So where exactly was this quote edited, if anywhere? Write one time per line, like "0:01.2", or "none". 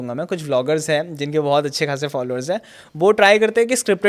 none